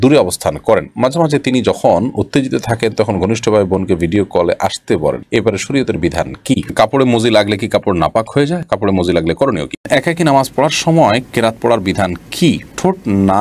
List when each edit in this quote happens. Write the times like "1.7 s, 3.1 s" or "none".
6.7 s, 9.8 s